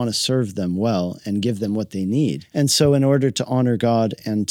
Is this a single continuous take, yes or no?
no